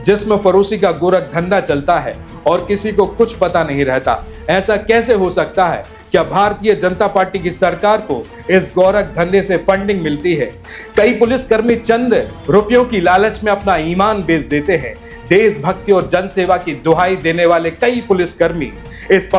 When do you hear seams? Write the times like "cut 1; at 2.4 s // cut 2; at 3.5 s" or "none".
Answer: cut 1; at 10.6 s